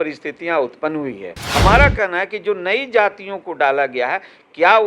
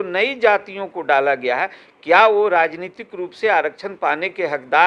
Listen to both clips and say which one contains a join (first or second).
first